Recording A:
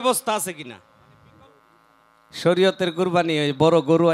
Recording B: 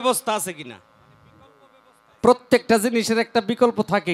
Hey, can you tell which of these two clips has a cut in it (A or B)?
A